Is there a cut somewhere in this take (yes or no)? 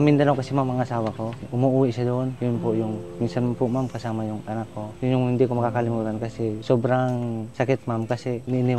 no